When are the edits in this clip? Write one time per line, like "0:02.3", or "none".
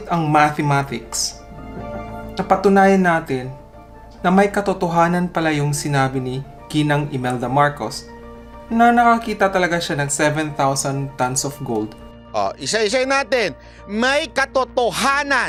none